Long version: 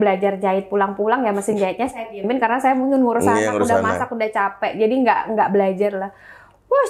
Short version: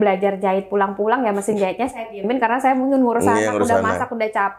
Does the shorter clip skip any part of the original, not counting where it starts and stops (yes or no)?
no